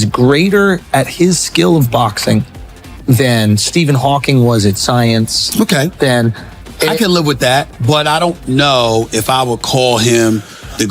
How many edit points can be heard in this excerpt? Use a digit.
0